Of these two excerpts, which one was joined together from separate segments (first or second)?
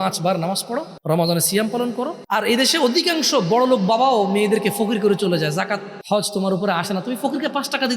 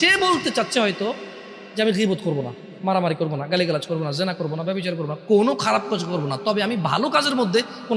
first